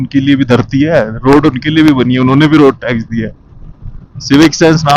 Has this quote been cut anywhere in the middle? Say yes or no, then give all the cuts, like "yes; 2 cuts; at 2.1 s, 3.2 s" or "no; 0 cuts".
no; 0 cuts